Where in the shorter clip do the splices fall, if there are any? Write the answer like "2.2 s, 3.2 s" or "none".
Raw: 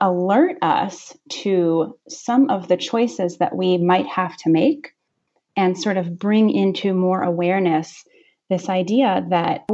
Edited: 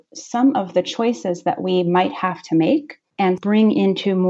3.3 s